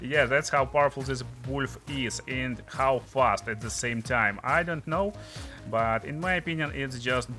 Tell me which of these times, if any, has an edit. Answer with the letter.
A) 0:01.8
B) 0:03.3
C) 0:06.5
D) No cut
D